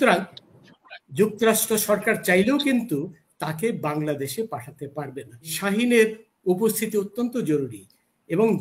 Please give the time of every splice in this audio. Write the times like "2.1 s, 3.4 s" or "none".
5.5 s